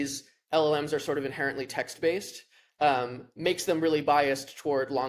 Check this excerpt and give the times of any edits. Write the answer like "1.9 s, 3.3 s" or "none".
none